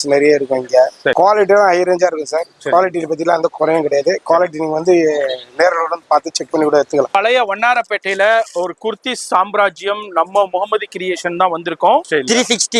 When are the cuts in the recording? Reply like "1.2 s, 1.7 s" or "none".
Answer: 1.1 s, 7.1 s, 12.0 s